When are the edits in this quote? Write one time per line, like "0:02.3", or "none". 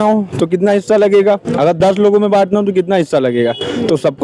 none